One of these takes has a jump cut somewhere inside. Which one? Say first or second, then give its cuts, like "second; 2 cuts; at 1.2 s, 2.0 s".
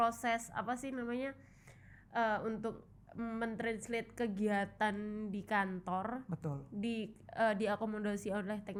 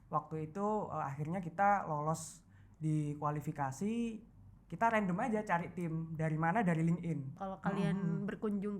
second; 1 cut; at 7.4 s